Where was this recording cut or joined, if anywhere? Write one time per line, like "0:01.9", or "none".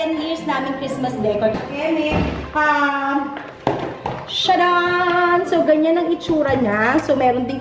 0:01.5